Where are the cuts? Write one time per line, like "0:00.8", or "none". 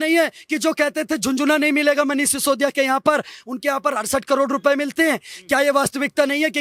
none